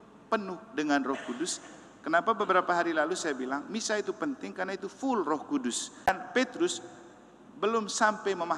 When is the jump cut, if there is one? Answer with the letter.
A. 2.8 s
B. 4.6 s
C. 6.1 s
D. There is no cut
C